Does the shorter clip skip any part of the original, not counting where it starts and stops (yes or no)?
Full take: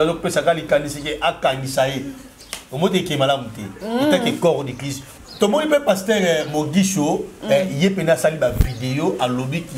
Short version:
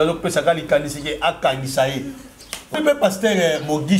yes